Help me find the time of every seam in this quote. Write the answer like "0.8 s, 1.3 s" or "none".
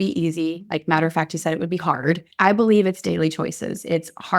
2.3 s